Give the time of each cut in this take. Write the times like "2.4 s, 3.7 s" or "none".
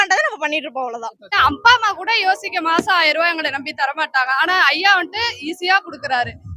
1.4 s